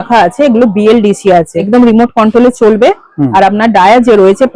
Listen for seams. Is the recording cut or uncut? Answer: cut